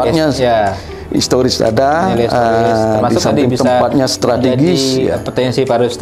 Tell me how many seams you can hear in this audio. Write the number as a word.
zero